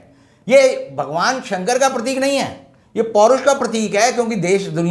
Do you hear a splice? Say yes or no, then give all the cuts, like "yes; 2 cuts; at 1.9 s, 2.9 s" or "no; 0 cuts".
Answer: no; 0 cuts